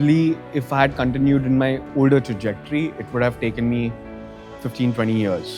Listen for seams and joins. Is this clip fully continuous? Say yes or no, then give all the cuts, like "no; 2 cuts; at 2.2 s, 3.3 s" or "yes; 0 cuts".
yes; 0 cuts